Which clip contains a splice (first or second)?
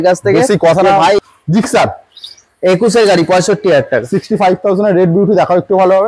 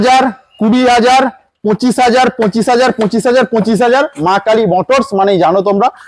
first